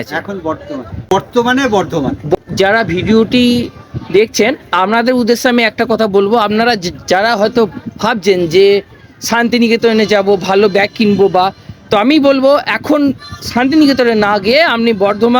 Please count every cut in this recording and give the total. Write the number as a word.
two